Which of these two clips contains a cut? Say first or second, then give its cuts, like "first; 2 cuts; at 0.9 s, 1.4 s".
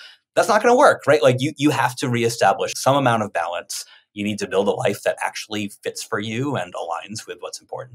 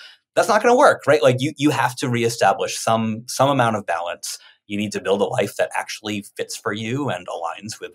first; 1 cut; at 2.7 s